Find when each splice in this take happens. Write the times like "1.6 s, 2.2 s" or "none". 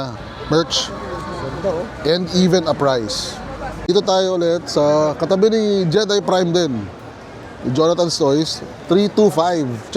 3.9 s